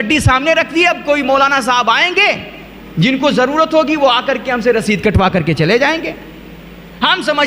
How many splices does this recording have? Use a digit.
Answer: 0